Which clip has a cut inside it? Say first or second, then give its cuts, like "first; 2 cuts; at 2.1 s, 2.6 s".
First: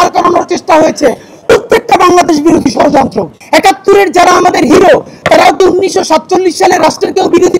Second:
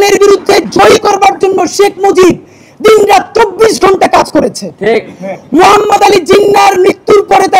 first; 1 cut; at 3.3 s